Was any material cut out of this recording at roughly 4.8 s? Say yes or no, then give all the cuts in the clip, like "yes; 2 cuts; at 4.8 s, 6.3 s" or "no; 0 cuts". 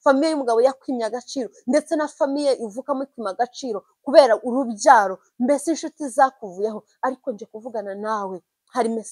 no; 0 cuts